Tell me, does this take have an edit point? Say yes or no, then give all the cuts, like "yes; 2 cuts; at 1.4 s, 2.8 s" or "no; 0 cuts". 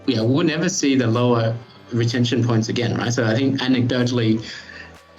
no; 0 cuts